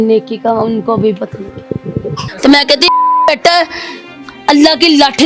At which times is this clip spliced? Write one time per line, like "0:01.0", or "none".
0:02.3